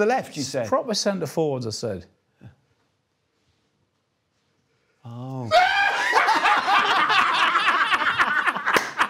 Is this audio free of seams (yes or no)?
yes